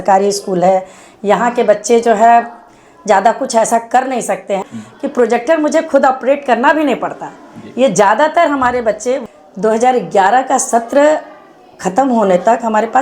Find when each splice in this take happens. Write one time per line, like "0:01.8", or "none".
0:04.6
0:09.2